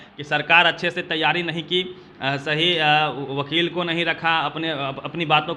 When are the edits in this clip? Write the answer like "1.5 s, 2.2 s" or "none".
none